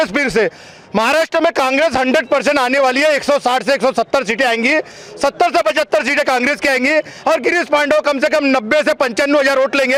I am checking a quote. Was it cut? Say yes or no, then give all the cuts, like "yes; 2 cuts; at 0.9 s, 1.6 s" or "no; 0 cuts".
no; 0 cuts